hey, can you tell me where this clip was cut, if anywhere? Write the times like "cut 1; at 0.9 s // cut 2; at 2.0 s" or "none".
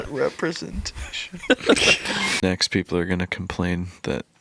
cut 1; at 2.3 s